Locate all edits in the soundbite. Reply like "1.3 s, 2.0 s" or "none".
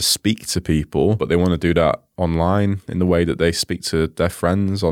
1.2 s